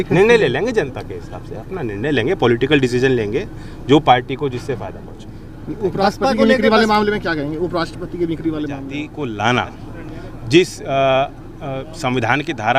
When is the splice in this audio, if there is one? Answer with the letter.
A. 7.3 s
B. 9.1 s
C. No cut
B